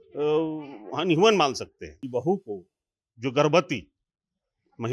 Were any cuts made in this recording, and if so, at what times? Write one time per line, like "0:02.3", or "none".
0:02.0